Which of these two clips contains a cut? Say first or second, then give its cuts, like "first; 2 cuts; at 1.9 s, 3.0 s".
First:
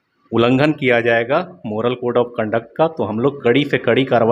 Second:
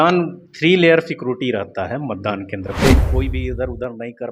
second; 1 cut; at 3.0 s